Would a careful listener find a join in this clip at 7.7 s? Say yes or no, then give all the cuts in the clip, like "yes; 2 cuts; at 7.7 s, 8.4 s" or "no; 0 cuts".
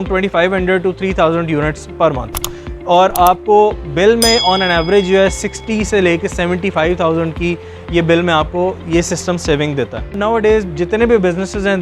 no; 1 cut; at 10.2 s